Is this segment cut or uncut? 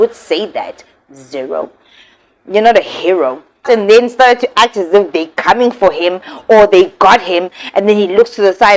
cut